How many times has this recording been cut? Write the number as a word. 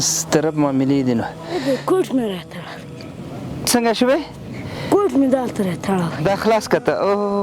two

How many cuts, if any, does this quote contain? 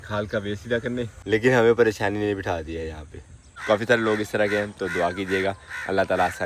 two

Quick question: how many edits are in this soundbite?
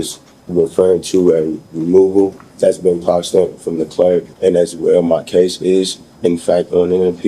two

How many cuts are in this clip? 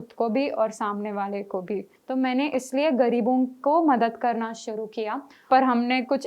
two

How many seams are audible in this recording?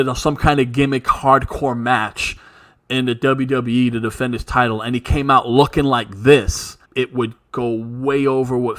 one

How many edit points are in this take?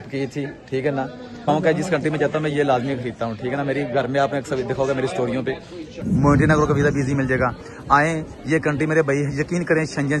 two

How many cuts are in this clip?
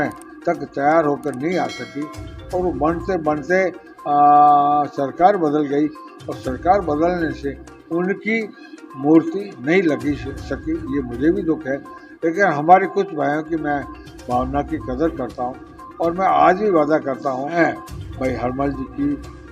one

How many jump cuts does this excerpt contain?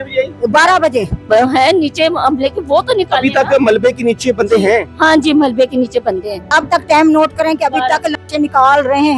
two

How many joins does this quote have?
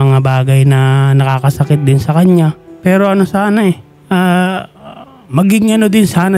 two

